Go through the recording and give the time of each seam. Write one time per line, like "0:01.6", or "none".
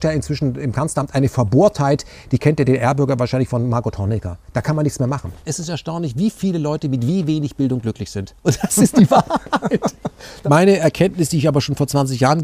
0:05.5
0:10.3